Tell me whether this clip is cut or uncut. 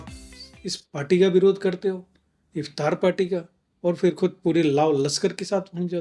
uncut